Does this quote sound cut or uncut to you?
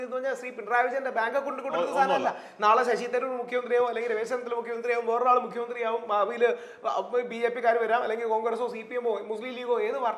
uncut